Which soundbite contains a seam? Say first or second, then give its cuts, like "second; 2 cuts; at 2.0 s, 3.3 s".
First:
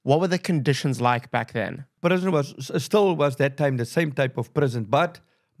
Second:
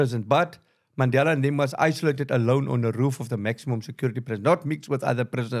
first; 1 cut; at 1.8 s